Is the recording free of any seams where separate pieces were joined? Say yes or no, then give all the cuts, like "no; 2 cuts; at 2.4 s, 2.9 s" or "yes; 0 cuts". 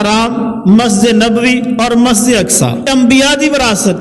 no; 1 cut; at 2.8 s